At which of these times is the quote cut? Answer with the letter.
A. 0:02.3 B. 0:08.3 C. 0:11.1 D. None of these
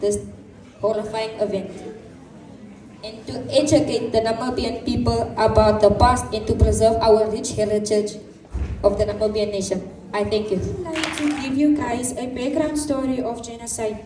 C